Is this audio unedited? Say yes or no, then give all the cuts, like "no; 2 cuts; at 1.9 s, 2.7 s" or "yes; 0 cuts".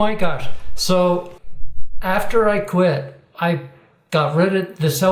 no; 1 cut; at 1.4 s